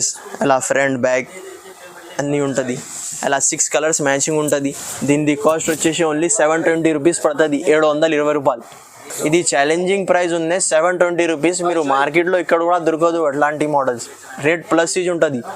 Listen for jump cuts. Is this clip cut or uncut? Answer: uncut